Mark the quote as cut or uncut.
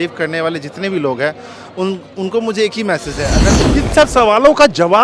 cut